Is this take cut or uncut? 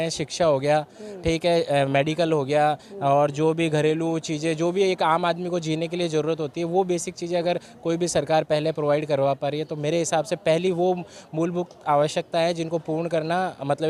uncut